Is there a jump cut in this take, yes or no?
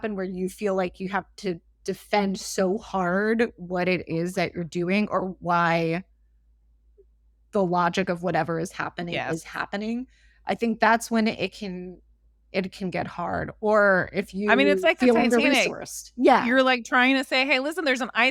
no